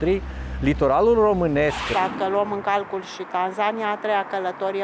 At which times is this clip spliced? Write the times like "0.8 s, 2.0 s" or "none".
1.8 s

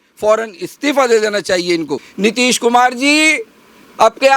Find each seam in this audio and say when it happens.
2.0 s

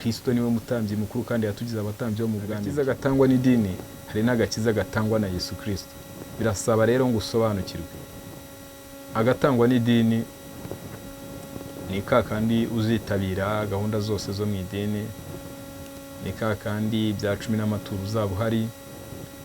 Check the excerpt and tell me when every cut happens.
2.7 s

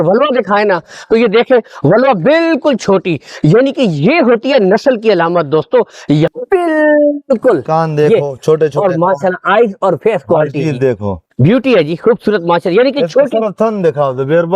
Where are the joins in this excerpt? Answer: 6.3 s

